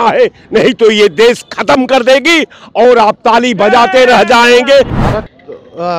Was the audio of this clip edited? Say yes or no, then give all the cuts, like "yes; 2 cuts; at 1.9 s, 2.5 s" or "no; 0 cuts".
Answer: yes; 1 cut; at 5.0 s